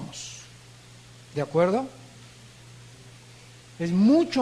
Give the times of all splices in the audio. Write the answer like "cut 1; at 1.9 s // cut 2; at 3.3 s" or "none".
cut 1; at 1.2 s